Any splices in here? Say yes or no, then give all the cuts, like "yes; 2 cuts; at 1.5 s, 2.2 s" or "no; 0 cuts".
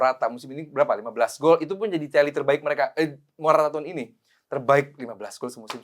no; 0 cuts